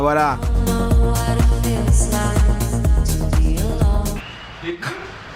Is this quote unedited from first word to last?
yes; 0 cuts

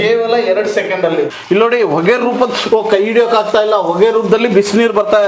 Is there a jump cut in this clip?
yes; 1 cut; at 1.3 s

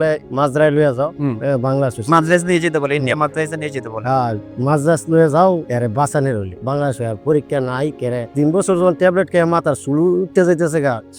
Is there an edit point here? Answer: no; 0 cuts

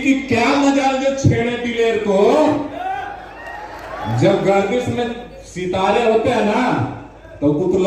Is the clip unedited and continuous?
yes; 0 cuts

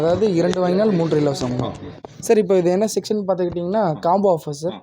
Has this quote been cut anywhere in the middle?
yes; 1 cut; at 2.1 s

